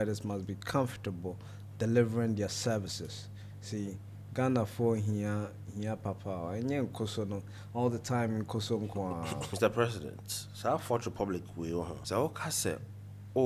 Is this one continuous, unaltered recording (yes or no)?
no